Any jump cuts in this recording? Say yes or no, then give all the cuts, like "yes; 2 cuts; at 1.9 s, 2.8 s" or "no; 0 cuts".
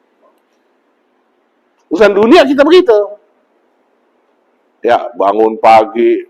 no; 0 cuts